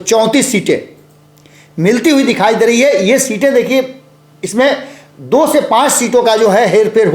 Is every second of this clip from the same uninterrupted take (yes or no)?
yes